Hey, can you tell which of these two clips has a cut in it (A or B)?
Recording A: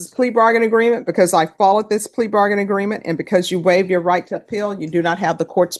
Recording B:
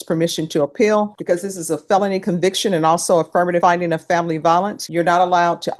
B